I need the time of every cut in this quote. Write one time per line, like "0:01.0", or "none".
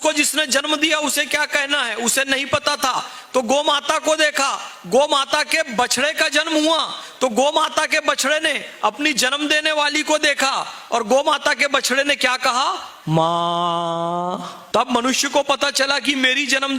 none